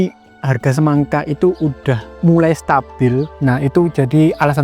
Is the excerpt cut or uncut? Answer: cut